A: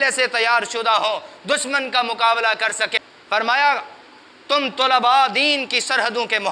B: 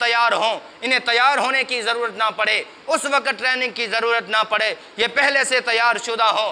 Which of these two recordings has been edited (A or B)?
A